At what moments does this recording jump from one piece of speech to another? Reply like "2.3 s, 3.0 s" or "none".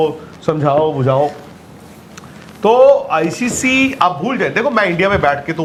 none